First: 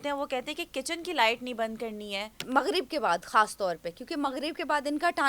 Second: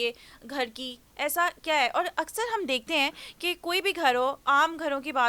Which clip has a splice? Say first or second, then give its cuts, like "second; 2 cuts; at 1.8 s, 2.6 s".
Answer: first; 1 cut; at 2.4 s